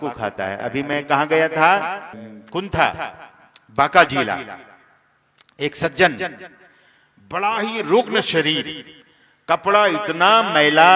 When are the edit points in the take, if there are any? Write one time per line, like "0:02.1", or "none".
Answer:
none